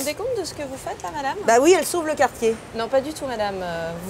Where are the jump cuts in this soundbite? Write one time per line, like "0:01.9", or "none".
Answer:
none